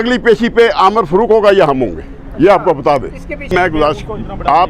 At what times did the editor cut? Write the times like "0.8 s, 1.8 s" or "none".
3.5 s